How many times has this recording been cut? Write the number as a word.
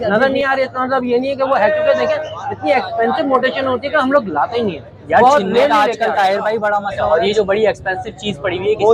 one